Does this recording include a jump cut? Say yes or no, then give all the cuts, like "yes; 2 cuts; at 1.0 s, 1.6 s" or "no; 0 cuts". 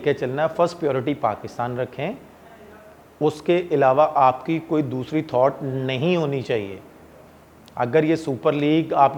no; 0 cuts